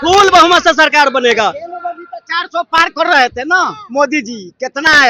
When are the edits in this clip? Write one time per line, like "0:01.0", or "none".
none